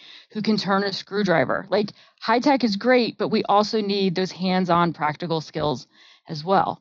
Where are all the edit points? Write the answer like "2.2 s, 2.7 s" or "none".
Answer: none